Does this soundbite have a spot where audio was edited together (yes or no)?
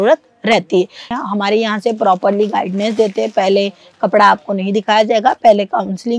yes